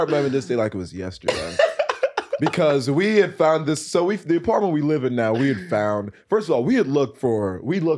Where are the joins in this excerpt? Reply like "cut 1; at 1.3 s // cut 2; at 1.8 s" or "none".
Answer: none